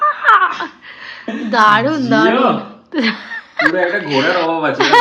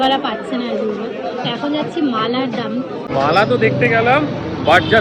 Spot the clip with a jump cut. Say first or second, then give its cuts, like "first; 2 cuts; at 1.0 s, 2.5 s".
second; 1 cut; at 3.1 s